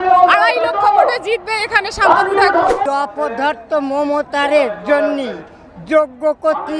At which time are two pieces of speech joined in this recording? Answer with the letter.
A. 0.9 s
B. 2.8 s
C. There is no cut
B